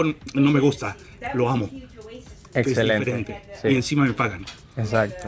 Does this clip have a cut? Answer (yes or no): no